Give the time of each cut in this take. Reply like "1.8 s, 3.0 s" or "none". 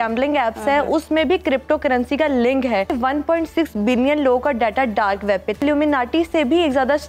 2.9 s, 5.6 s